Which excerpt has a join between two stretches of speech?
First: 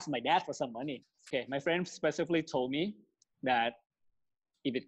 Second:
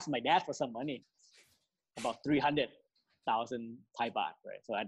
first; 1 cut; at 1.2 s

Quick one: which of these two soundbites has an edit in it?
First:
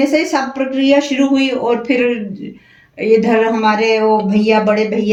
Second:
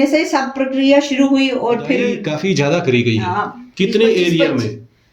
second; 1 cut; at 2.3 s

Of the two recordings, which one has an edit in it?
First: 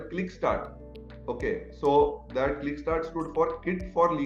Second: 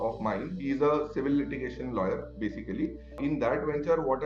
second; 1 cut; at 3.0 s

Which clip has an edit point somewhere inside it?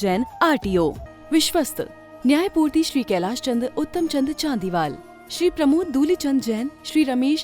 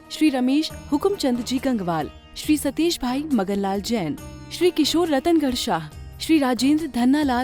first; 1 cut; at 1.1 s

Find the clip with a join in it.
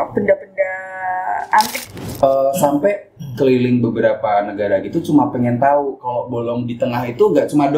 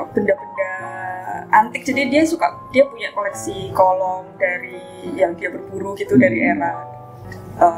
first; 1 cut; at 1.8 s

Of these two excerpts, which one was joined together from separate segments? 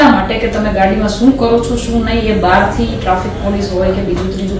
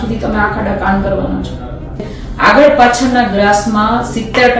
second; 1 cut; at 2.1 s

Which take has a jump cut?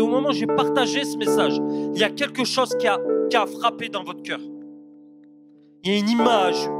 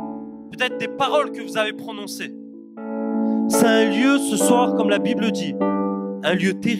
second; 1 cut; at 2.9 s

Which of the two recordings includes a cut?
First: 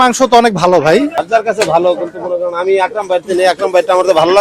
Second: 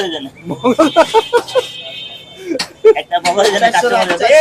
first; 1 cut; at 1.2 s

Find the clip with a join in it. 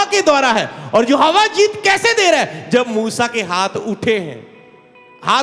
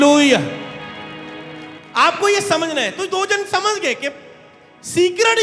second; 1 cut; at 1.8 s

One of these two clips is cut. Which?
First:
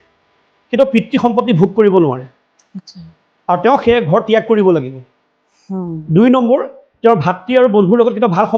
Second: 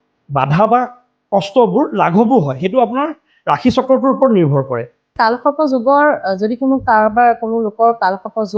second; 1 cut; at 5.2 s

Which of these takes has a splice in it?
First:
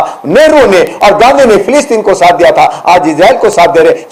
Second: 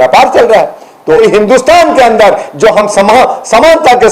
second; 1 cut; at 1.1 s

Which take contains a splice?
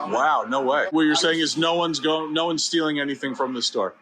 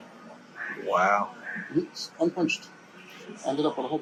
first; 1 cut; at 0.9 s

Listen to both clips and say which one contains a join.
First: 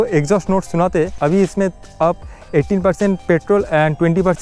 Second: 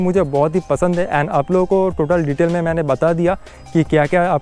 first; 1 cut; at 1.1 s

